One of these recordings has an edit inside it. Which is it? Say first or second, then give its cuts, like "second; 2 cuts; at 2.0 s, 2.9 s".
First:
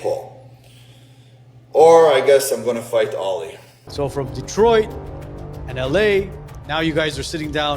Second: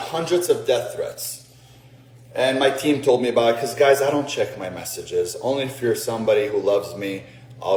first; 1 cut; at 3.9 s